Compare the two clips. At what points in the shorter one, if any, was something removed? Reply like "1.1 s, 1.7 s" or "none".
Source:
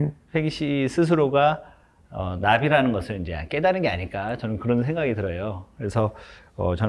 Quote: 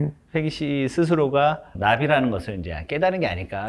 1.7 s